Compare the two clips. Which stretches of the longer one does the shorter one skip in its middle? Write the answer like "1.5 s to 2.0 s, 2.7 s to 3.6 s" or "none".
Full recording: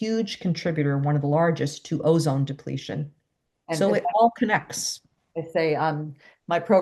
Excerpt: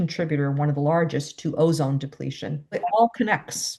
3.2 s to 4.0 s